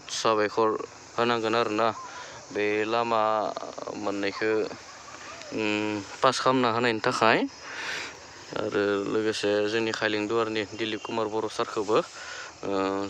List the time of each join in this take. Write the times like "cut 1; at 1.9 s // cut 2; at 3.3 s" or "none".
none